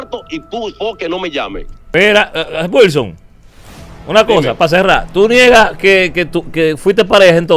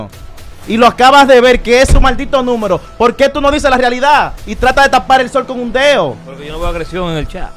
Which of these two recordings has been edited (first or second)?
first